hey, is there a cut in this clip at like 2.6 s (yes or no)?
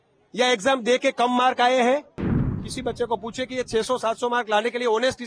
yes